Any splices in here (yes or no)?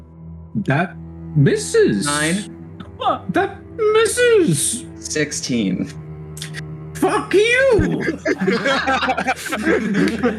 no